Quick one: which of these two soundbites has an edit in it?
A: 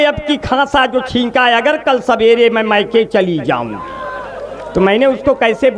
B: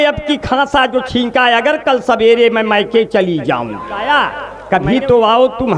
B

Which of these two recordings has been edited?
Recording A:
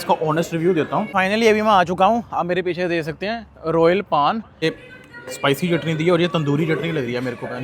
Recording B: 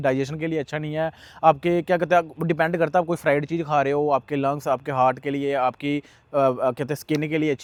A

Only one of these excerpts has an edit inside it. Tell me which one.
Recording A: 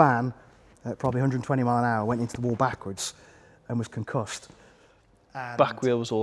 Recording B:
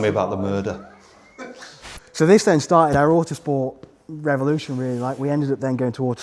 B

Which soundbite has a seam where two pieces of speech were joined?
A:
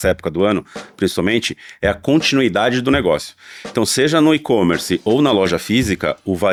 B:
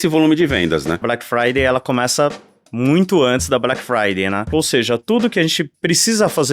B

